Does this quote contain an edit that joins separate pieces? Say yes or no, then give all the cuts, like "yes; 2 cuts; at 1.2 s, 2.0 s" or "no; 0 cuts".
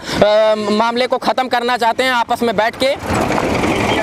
no; 0 cuts